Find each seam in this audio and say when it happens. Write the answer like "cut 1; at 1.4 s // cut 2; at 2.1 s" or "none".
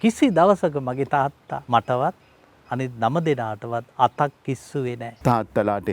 cut 1; at 1.5 s // cut 2; at 5.1 s